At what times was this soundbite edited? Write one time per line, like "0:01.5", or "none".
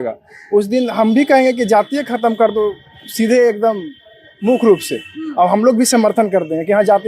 none